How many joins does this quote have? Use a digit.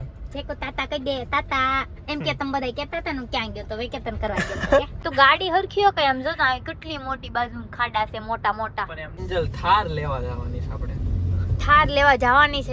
2